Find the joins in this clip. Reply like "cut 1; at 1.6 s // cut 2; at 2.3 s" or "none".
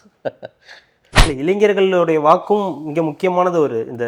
cut 1; at 1.0 s